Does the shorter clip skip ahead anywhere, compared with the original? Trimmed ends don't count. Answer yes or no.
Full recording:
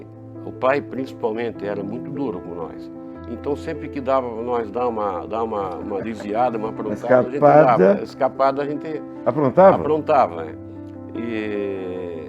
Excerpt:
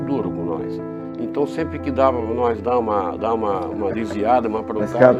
no